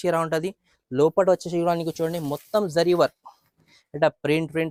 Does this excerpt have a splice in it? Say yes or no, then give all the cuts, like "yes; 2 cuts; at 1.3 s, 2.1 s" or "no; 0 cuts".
no; 0 cuts